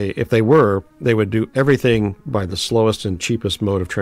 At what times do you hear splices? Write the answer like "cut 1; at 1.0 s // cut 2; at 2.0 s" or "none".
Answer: none